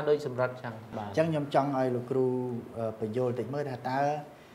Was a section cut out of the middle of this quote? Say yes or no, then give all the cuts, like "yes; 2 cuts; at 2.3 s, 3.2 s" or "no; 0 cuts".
yes; 1 cut; at 1.0 s